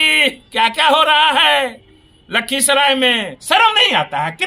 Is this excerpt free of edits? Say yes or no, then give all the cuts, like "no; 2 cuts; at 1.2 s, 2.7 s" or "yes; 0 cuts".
no; 1 cut; at 3.3 s